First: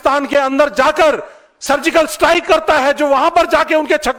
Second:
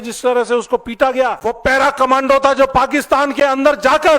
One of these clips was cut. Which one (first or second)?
second